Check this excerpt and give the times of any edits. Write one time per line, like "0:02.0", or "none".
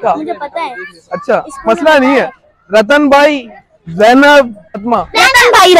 0:04.8